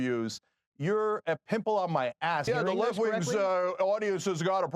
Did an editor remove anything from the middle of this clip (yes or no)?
yes